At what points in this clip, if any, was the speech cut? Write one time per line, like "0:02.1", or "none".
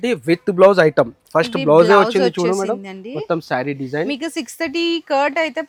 none